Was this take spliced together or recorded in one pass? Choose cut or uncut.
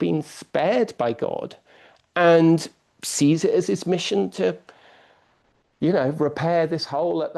uncut